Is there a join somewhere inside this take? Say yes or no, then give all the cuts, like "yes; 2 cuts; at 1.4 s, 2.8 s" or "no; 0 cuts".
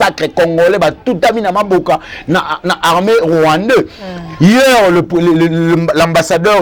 no; 0 cuts